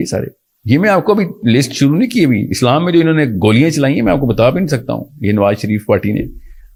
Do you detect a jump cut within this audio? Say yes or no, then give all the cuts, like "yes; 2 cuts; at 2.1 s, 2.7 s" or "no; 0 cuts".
no; 0 cuts